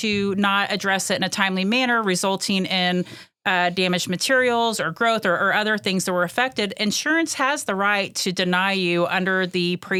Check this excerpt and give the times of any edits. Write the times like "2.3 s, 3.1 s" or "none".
none